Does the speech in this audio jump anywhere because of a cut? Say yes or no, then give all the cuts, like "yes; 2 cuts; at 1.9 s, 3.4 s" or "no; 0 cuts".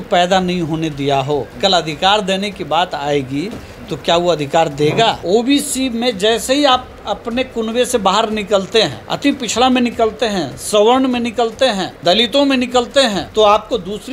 yes; 5 cuts; at 1.5 s, 5.2 s, 9.0 s, 11.9 s, 13.2 s